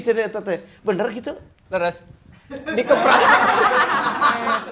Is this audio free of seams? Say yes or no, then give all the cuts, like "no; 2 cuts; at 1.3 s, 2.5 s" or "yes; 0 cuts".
yes; 0 cuts